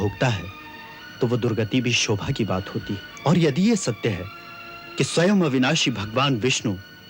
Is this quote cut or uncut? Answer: cut